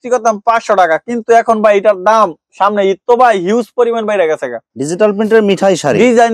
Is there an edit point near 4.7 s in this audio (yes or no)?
yes